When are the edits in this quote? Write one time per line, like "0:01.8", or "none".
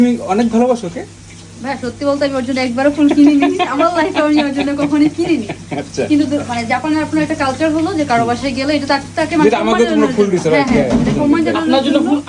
none